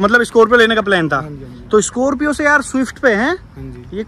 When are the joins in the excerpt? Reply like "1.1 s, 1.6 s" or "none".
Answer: none